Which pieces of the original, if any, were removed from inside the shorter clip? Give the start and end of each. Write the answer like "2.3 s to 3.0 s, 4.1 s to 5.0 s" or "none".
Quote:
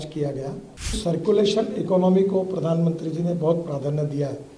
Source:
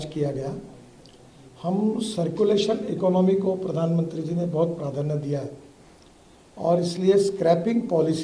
1.0 s to 2.1 s